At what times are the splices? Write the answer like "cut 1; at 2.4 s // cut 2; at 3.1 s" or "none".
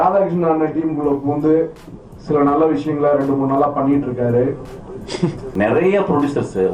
cut 1; at 5.5 s

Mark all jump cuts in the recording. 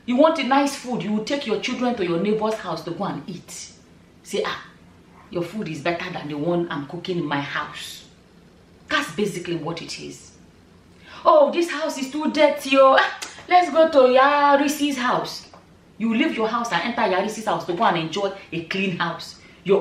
none

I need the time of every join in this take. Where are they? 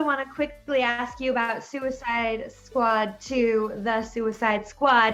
none

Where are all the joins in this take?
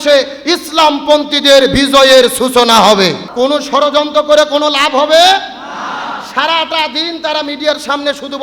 cut 1; at 3.2 s

